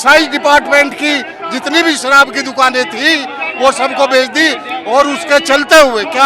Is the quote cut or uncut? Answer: uncut